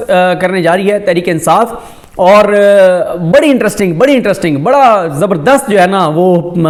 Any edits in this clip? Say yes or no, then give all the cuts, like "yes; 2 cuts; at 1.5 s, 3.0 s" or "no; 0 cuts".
no; 0 cuts